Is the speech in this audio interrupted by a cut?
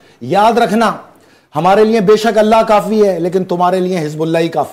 no; 0 cuts

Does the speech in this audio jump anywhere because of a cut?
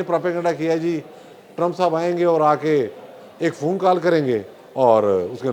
no; 0 cuts

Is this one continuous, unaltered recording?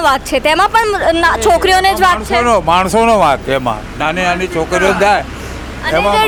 yes; 0 cuts

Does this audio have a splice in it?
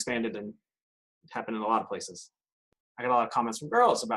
yes; 1 cut; at 2.6 s

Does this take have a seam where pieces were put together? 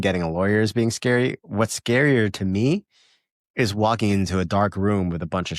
no; 0 cuts

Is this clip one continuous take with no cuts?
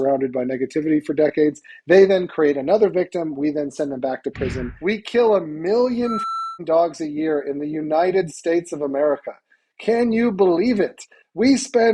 no; 1 cut; at 4.7 s

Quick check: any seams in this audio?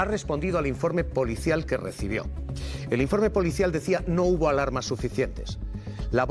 no; 0 cuts

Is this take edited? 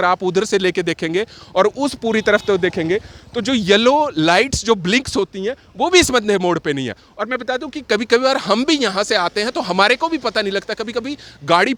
no; 0 cuts

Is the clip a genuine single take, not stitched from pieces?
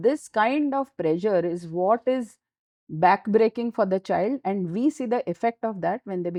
yes; 0 cuts

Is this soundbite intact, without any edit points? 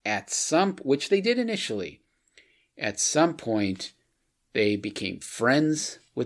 yes; 0 cuts

